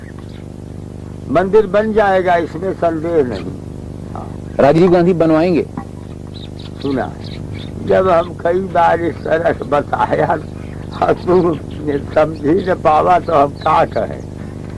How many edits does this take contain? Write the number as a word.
zero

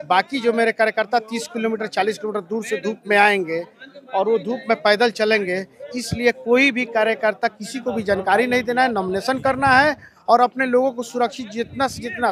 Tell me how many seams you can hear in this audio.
zero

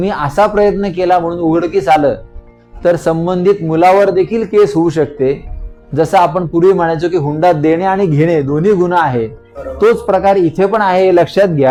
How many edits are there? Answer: zero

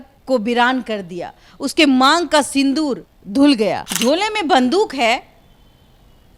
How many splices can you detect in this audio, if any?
one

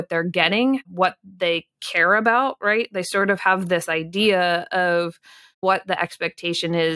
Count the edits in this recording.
two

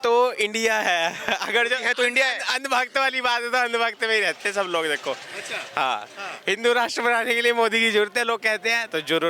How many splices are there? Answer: zero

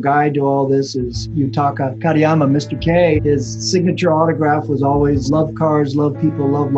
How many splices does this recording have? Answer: one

